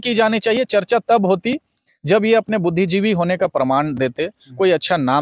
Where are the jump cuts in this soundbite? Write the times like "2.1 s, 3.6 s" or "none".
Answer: none